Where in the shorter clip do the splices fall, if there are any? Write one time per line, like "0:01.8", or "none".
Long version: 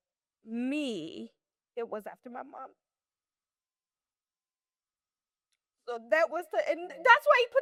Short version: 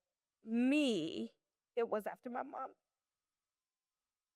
none